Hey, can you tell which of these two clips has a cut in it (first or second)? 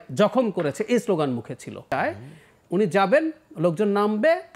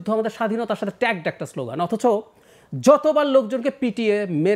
first